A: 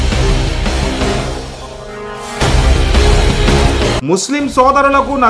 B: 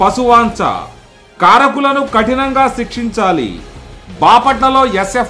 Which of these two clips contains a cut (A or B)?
A